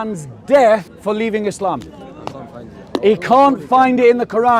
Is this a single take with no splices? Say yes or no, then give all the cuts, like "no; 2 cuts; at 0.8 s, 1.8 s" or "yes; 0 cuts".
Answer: no; 1 cut; at 0.9 s